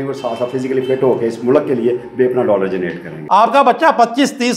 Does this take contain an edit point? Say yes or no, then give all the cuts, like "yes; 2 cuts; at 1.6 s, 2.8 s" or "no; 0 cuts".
yes; 1 cut; at 3.1 s